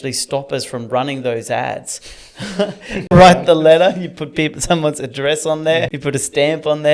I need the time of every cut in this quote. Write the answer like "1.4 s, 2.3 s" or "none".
3.1 s, 5.9 s